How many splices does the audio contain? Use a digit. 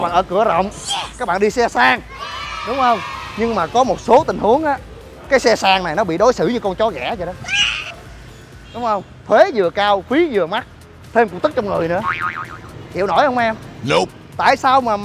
0